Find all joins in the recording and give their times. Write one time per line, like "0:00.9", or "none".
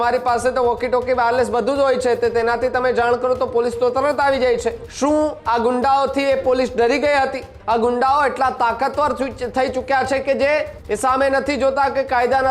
0:04.9
0:07.5
0:10.8